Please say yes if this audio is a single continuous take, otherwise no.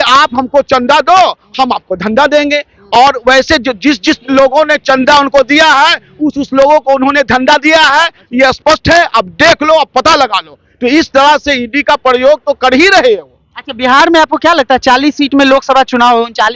yes